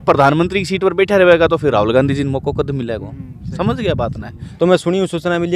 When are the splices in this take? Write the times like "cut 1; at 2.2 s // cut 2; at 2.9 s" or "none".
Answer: cut 1; at 4.4 s